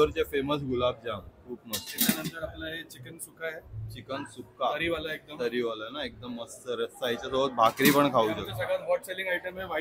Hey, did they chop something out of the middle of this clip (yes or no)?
no